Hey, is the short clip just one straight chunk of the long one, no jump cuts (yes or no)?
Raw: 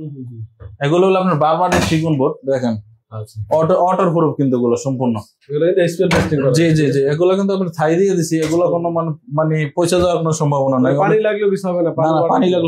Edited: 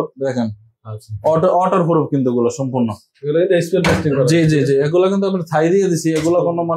yes